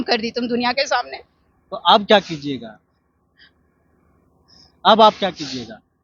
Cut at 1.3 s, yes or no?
no